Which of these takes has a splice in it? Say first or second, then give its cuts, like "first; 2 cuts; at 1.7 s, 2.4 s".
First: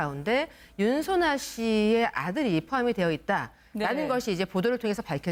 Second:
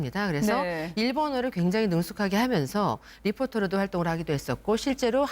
second; 1 cut; at 2.6 s